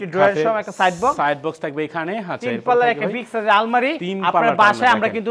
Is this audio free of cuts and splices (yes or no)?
yes